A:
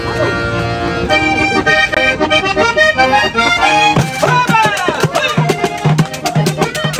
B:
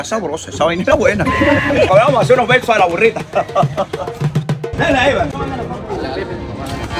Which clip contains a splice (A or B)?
B